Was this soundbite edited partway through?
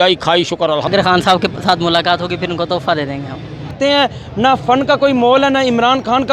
yes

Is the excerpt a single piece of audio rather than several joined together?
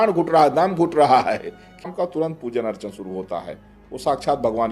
no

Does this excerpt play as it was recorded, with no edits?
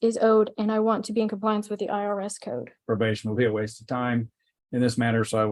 no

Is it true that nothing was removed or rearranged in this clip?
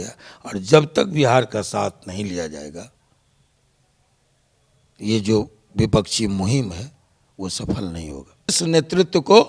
no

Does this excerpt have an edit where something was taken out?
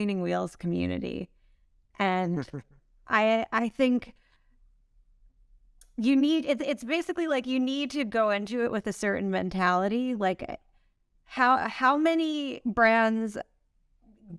no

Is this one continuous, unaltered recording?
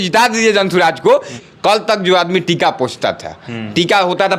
no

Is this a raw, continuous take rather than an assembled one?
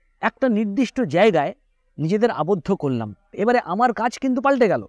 no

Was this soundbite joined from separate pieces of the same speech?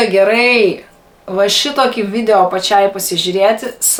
no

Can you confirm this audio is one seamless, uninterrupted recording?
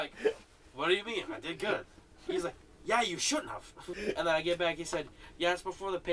no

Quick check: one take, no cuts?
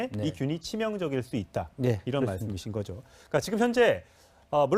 yes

